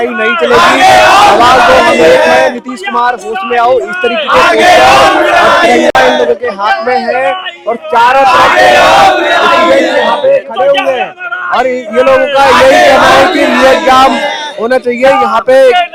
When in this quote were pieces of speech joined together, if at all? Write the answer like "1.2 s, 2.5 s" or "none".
none